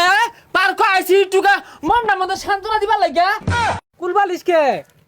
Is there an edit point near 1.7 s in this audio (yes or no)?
no